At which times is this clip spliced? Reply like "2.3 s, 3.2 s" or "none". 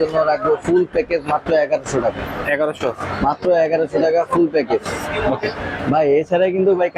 none